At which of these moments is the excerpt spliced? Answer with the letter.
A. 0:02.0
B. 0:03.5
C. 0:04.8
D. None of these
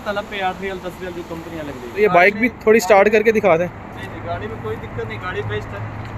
A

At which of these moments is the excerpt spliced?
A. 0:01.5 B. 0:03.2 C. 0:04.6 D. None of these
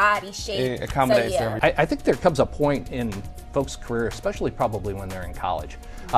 A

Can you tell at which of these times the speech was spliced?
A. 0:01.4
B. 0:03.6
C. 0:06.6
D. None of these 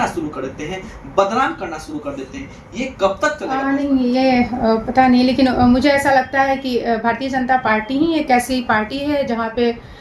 B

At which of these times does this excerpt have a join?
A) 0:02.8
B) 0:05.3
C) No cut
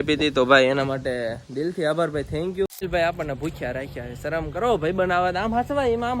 A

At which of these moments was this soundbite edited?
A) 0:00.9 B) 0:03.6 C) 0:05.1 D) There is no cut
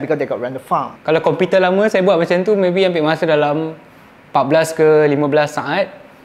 A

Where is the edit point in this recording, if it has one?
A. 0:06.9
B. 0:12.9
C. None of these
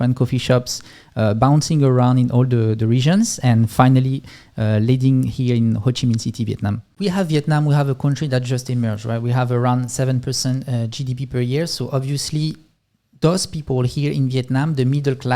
A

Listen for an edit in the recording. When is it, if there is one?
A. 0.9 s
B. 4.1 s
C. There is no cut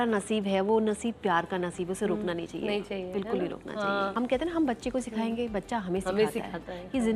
B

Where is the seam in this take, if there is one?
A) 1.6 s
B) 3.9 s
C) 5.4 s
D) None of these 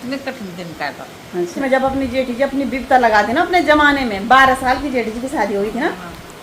A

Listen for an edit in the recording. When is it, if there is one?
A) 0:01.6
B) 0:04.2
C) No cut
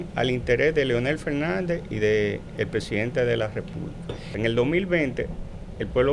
B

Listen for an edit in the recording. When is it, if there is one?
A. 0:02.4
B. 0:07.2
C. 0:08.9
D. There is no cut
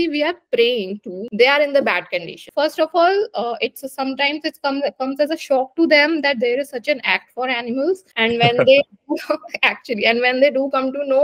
A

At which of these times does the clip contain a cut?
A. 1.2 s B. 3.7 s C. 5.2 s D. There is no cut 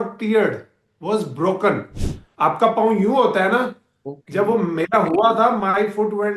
D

